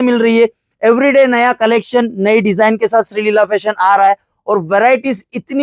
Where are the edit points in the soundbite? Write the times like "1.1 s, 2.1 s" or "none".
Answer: none